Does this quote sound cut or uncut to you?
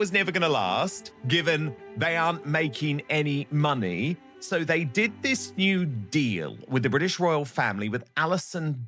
cut